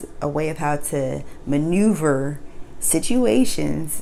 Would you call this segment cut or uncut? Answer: uncut